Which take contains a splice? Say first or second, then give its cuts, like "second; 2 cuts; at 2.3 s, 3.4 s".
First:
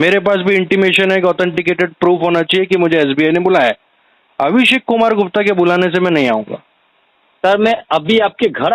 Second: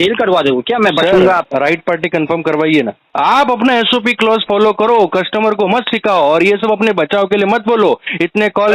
second; 2 cuts; at 1.5 s, 3.0 s